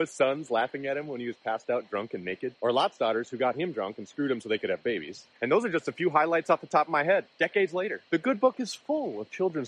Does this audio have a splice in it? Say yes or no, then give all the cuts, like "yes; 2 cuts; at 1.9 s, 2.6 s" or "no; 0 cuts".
no; 0 cuts